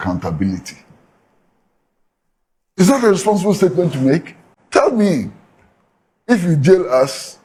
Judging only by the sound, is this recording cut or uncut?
uncut